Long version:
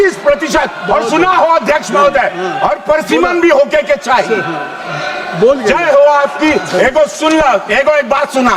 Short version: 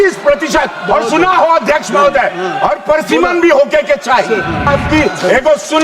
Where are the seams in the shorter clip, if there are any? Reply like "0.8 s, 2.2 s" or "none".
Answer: 4.7 s